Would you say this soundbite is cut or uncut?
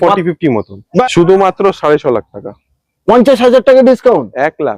cut